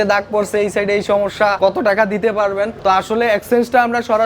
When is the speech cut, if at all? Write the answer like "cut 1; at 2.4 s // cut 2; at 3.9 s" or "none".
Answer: cut 1; at 1.6 s // cut 2; at 2.7 s